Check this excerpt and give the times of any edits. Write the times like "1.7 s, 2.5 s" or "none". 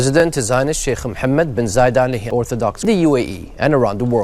2.2 s